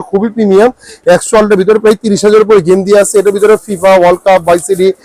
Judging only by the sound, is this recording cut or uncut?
uncut